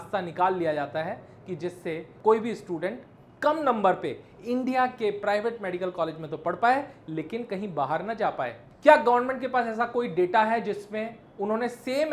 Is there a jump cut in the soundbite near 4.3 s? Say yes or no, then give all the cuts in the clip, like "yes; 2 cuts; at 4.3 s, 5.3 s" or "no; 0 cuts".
no; 1 cut; at 8.6 s